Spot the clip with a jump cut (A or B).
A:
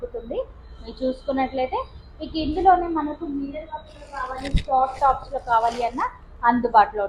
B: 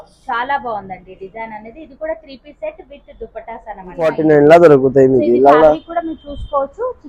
B